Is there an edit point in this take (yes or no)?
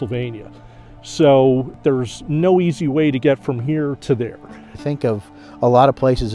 yes